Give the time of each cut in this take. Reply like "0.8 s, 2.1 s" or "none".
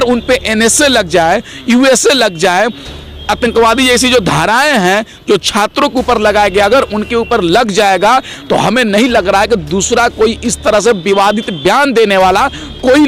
none